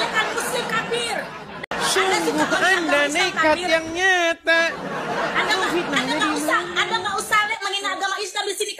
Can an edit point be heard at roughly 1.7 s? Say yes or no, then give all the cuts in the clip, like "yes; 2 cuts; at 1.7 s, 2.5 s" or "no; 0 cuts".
yes; 1 cut; at 1.7 s